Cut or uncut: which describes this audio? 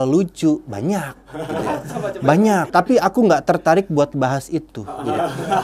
cut